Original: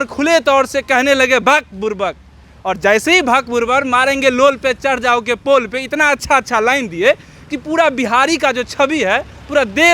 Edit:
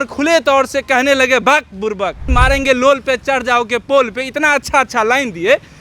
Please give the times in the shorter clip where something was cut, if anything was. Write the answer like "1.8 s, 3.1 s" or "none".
2.3 s